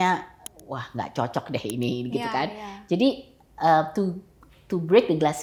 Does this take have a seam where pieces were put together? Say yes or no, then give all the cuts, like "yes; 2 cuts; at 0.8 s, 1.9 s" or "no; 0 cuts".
no; 0 cuts